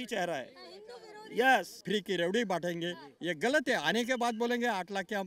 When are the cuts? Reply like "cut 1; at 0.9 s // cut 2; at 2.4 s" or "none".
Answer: cut 1; at 1.7 s